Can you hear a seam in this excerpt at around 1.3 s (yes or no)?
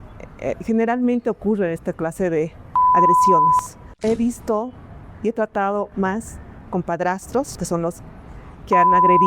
no